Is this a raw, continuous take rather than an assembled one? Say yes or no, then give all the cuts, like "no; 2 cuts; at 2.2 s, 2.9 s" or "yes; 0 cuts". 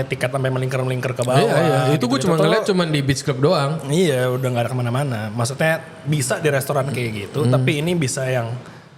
yes; 0 cuts